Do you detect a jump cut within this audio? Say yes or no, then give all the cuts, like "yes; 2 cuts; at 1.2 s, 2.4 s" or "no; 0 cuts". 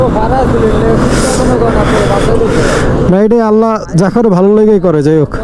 no; 0 cuts